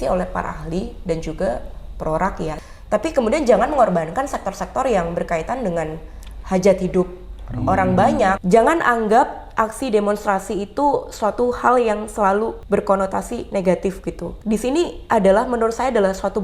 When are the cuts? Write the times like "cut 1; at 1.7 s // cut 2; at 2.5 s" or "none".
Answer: cut 1; at 2.7 s // cut 2; at 8.4 s // cut 3; at 12.6 s // cut 4; at 14.3 s

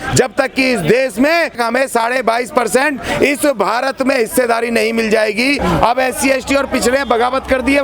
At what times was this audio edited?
cut 1; at 1.6 s // cut 2; at 5.6 s

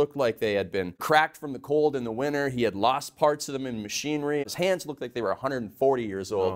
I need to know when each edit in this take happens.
cut 1; at 1.0 s // cut 2; at 4.4 s

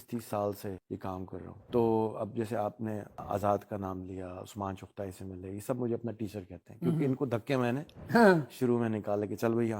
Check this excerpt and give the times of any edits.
cut 1; at 1.4 s // cut 2; at 3.2 s

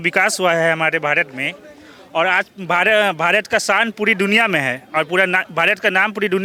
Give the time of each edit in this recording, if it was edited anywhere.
none

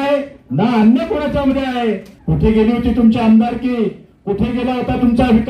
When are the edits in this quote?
cut 1; at 2.1 s

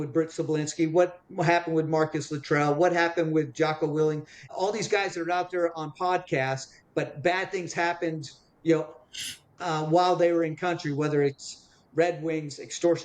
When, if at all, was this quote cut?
cut 1; at 4.4 s

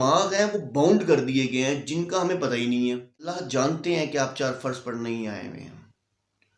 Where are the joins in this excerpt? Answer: cut 1; at 3.4 s

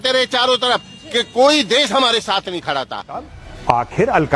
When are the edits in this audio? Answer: cut 1; at 3.4 s

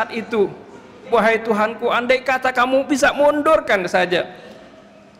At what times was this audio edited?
cut 1; at 1.0 s

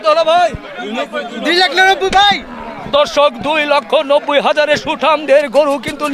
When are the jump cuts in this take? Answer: none

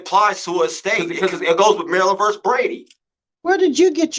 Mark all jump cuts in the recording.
cut 1; at 1.1 s

